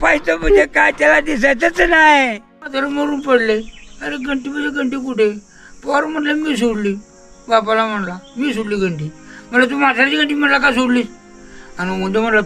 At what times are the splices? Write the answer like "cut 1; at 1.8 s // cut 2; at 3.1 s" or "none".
cut 1; at 2.7 s